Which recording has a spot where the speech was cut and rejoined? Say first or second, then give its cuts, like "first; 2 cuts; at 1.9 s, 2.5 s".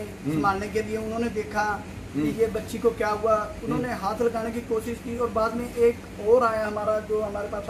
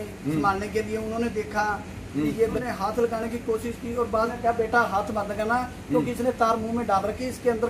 second; 2 cuts; at 2.6 s, 4.3 s